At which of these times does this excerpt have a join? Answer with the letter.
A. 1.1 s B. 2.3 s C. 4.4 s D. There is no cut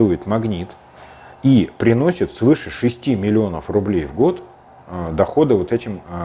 D